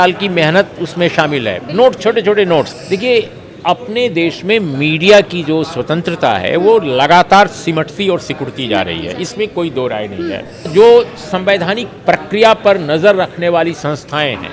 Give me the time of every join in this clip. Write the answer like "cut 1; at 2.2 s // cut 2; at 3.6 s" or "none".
cut 1; at 2.8 s // cut 2; at 10.7 s